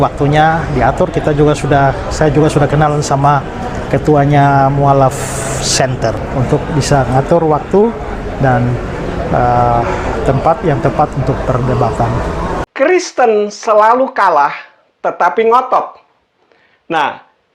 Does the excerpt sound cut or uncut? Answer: cut